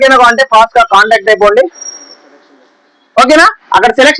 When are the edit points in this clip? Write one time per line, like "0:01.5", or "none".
none